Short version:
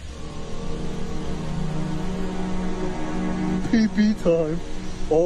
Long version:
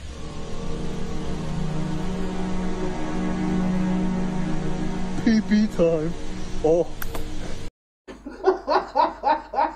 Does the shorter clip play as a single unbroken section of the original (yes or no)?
no